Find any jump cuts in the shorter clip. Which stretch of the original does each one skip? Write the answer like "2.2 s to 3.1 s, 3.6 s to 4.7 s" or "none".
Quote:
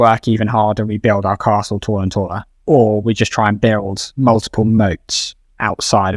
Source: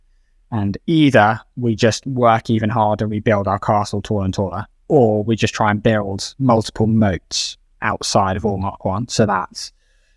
none